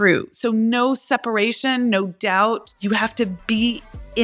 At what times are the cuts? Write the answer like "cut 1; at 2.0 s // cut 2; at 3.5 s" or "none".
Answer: cut 1; at 2.8 s